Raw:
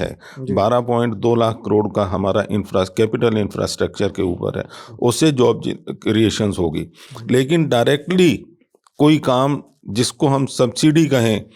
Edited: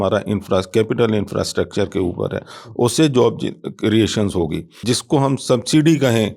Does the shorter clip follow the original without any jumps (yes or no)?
no